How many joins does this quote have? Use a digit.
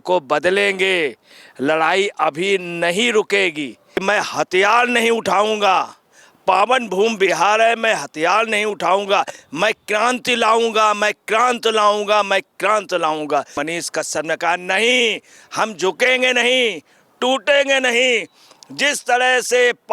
2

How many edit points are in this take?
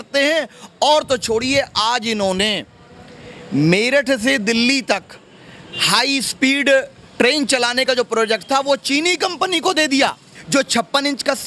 1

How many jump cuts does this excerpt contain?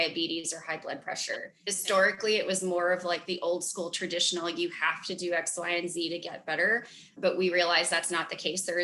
2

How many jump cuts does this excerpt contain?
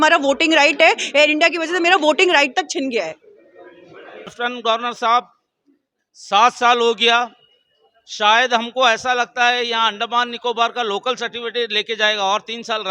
1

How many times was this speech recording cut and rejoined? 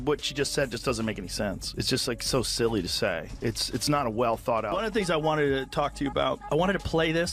1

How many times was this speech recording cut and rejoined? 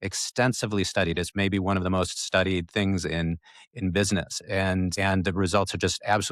1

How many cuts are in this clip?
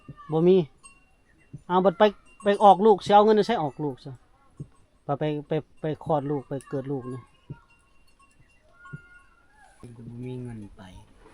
1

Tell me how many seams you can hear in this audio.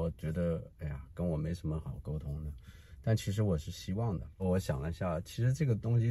1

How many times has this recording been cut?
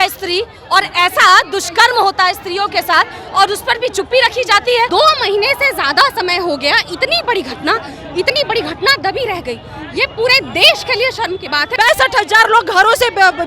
2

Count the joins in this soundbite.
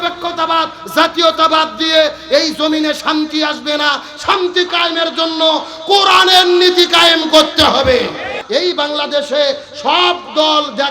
1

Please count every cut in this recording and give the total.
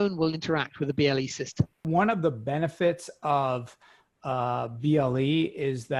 1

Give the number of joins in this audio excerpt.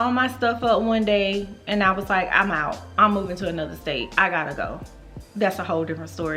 0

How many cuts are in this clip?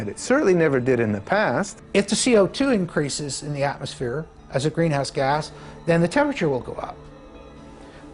1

